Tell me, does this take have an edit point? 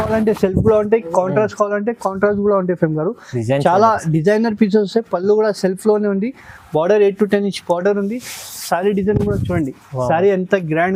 no; 0 cuts

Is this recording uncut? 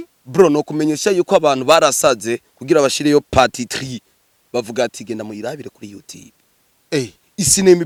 yes; 0 cuts

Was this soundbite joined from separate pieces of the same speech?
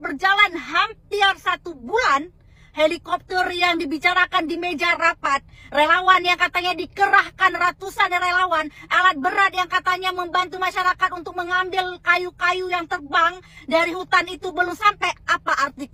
no; 0 cuts

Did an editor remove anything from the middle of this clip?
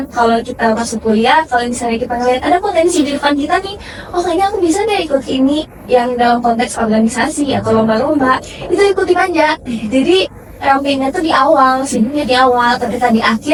no; 0 cuts

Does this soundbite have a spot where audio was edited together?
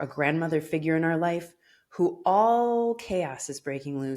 no; 0 cuts

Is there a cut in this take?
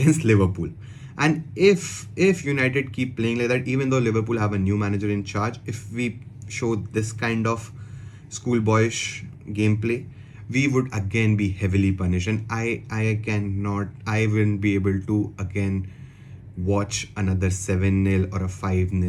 no; 0 cuts

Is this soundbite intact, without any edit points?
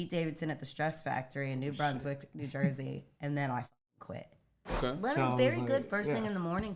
no; 1 cut; at 4.8 s

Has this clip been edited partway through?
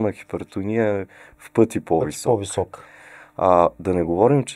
no; 0 cuts

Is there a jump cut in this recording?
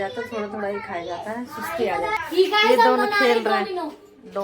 yes; 1 cut; at 2.2 s

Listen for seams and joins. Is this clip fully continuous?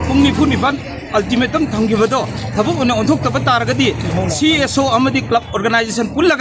yes; 0 cuts

